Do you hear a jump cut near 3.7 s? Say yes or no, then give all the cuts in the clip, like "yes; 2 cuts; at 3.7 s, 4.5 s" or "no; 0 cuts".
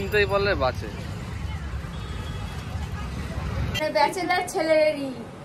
yes; 1 cut; at 3.7 s